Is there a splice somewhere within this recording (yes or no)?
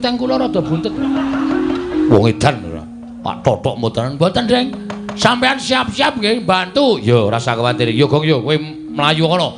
no